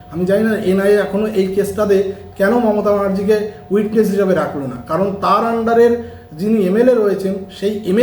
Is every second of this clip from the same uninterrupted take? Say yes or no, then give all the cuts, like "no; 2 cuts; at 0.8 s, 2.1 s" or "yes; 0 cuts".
yes; 0 cuts